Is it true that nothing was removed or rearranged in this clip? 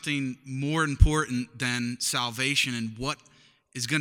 yes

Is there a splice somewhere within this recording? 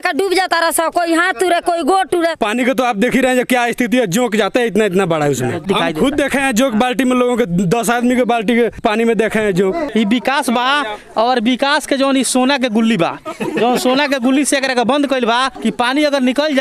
yes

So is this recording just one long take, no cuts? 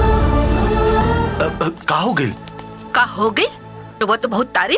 no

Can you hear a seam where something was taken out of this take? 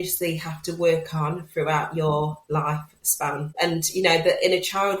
yes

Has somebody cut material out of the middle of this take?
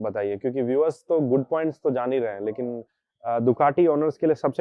no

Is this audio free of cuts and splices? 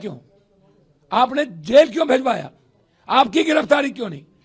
yes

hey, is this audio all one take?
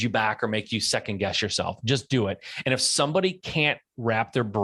yes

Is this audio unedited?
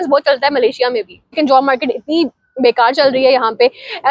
no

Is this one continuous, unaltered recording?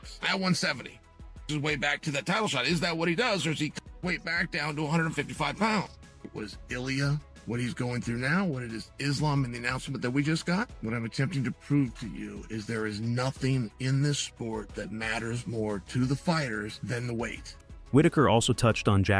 yes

